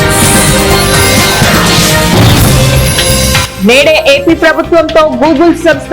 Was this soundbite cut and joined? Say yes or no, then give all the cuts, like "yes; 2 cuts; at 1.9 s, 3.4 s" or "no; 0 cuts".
yes; 1 cut; at 3.4 s